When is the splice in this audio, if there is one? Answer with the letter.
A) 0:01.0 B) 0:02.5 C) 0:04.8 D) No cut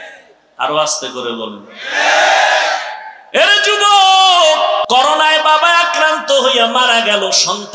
C